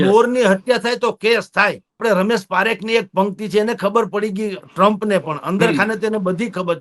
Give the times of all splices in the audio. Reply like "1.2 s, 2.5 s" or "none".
2.0 s